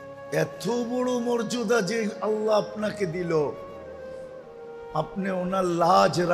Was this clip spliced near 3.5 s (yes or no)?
yes